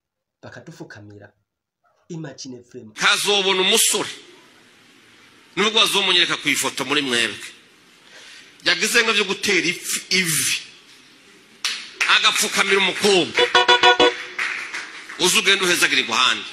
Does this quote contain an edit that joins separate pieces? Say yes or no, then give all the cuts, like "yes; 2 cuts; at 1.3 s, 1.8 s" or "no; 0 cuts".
yes; 1 cut; at 2.9 s